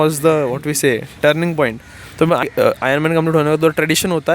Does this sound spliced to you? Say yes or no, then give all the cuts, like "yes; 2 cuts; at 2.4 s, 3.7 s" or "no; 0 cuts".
yes; 1 cut; at 2.4 s